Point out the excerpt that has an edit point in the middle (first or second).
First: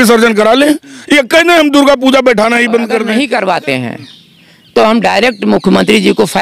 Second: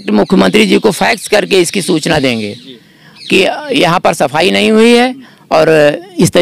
first